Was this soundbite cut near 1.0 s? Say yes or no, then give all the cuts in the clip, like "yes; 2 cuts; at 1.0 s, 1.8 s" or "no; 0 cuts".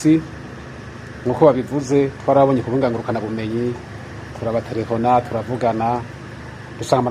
no; 0 cuts